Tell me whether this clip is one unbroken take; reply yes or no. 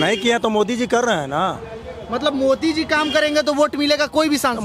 yes